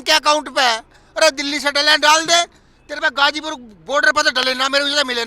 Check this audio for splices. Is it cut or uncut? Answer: uncut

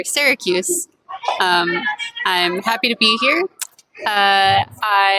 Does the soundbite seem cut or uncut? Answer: uncut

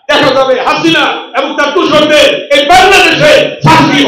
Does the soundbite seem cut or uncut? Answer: uncut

